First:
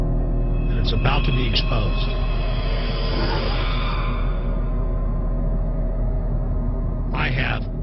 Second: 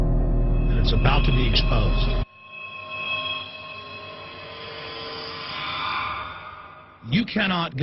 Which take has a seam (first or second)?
first